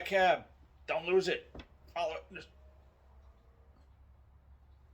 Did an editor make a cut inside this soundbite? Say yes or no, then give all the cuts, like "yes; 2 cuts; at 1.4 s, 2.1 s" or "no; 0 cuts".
no; 0 cuts